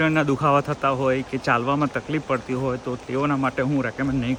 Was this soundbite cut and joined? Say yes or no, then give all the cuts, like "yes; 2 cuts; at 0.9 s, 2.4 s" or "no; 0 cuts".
no; 0 cuts